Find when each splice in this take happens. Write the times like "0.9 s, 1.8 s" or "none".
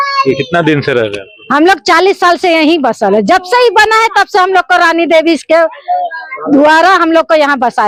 none